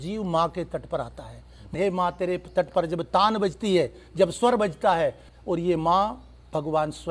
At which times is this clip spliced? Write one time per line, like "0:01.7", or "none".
0:01.7
0:05.3

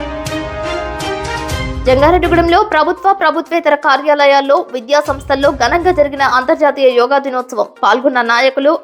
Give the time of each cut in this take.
0:01.7

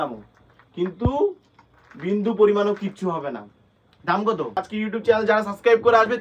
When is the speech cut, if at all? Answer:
0:04.6

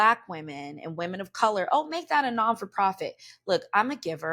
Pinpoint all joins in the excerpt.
none

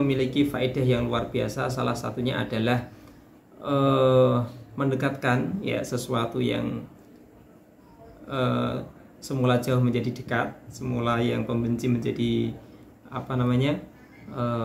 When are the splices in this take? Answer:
none

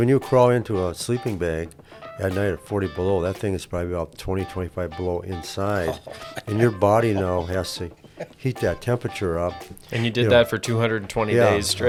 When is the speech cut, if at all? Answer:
none

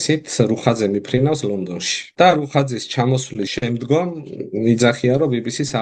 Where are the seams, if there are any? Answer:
0:02.1
0:03.5

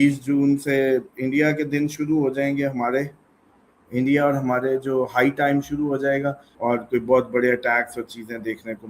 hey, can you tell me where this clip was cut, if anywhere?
0:06.5

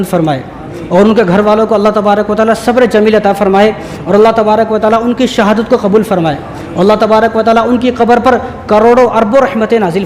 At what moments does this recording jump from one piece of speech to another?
none

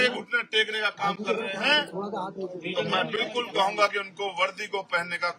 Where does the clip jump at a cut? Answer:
none

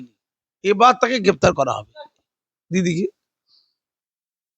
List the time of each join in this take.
none

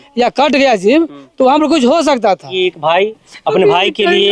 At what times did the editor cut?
0:02.5

